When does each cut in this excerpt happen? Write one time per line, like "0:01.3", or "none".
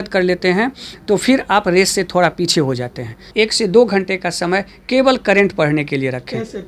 0:03.3